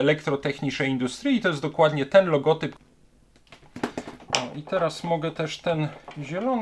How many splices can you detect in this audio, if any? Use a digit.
1